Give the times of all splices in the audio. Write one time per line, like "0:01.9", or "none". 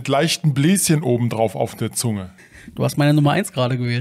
0:02.3